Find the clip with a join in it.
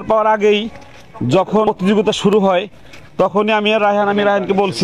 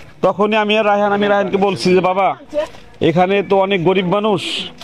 first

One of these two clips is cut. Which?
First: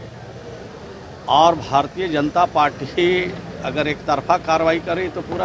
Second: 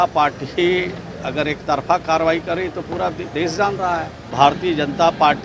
second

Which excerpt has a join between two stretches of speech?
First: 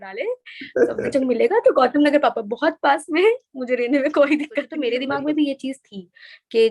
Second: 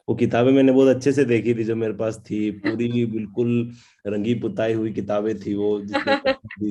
first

